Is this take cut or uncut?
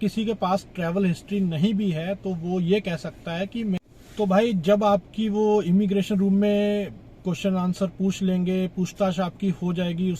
cut